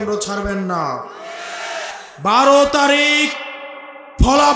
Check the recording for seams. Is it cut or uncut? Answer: cut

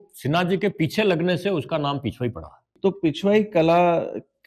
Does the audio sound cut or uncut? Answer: uncut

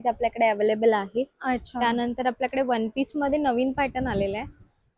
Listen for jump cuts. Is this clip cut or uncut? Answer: uncut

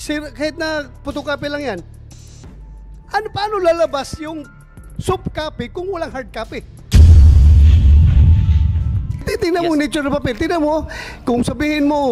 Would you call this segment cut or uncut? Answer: cut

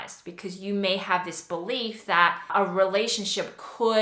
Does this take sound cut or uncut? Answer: cut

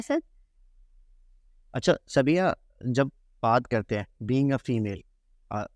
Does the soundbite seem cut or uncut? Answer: uncut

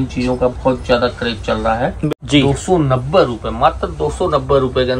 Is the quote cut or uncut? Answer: cut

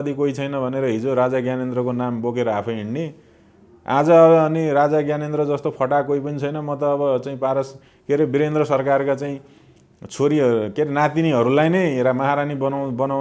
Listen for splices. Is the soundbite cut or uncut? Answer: uncut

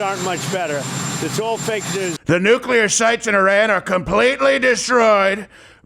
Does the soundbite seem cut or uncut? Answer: cut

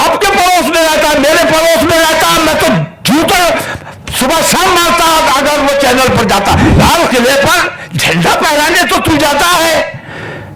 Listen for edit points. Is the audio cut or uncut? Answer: cut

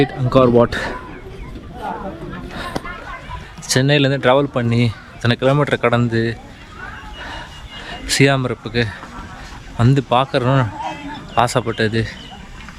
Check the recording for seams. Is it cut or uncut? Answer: uncut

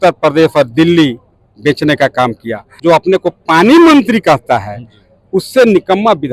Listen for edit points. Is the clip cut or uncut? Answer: cut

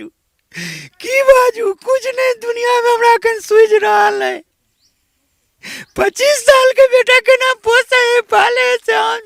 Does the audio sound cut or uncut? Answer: uncut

